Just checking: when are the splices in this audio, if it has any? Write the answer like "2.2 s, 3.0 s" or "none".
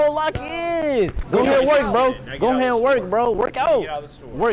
1.2 s